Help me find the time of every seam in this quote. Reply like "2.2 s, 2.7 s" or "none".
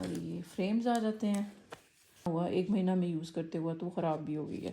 2.3 s

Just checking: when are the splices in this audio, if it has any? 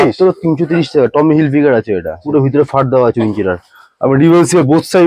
2.2 s

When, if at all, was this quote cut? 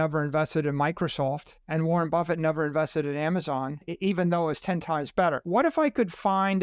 1.5 s, 3.9 s, 5.4 s

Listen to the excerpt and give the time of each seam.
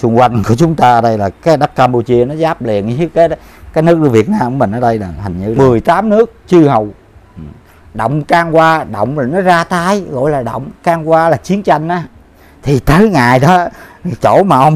5.5 s

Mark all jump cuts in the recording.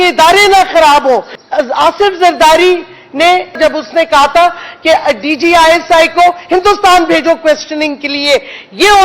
1.4 s, 3.6 s

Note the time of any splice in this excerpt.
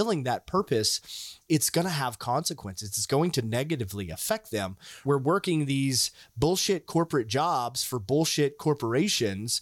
1.3 s, 5.0 s

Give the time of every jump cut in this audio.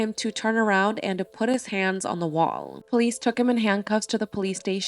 2.8 s

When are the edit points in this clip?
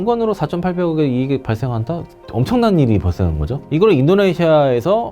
3.6 s

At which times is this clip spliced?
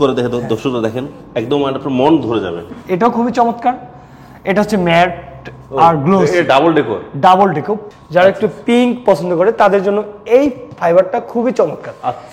2.7 s, 7.9 s

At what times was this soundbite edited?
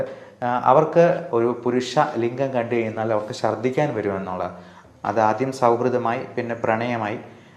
1.2 s, 4.7 s

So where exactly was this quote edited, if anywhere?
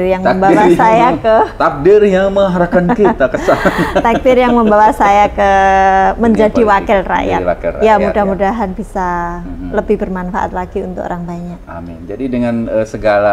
none

